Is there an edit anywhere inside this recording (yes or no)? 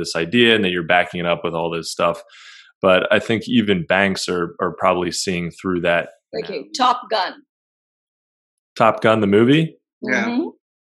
yes